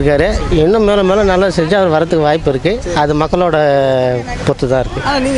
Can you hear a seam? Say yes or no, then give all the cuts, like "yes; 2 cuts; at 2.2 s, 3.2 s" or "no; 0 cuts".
no; 0 cuts